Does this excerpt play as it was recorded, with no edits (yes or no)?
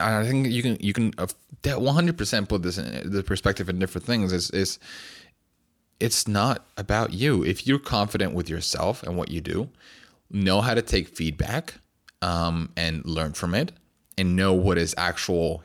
yes